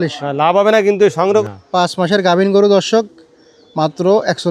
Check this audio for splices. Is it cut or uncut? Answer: cut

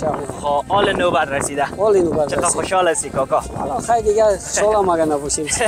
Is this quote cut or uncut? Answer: uncut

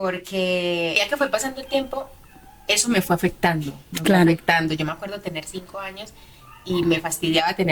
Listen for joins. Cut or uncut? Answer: cut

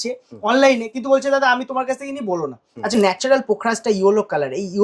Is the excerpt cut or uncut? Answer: cut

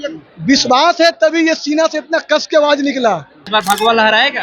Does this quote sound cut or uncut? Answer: cut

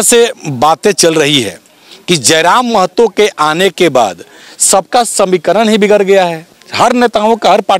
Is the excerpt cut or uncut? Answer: uncut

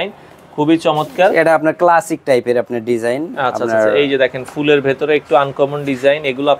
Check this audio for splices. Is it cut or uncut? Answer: uncut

